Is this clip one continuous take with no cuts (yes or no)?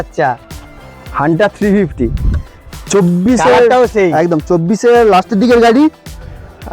yes